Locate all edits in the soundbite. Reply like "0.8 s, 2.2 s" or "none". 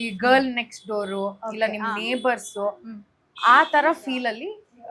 none